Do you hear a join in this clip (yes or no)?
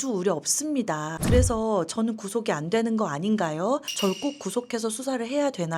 yes